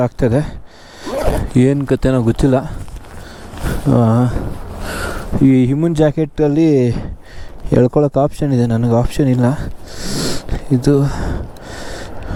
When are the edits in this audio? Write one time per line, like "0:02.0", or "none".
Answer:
none